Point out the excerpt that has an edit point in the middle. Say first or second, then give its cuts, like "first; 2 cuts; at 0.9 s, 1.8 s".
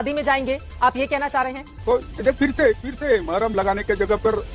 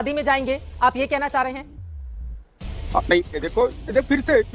first; 1 cut; at 1.8 s